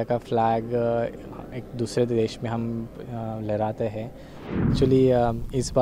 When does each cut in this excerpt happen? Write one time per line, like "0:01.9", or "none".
0:04.7